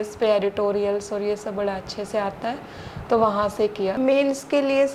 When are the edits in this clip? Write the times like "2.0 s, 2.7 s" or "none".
4.0 s